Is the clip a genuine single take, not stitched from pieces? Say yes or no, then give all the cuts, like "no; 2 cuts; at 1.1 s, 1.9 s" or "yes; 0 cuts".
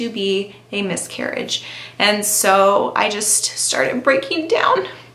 yes; 0 cuts